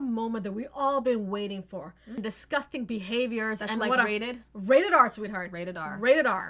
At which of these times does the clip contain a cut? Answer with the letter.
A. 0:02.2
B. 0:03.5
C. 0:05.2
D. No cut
A